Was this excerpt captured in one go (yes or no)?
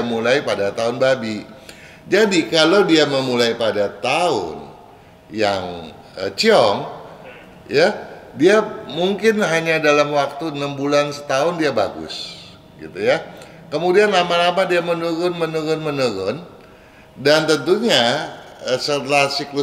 yes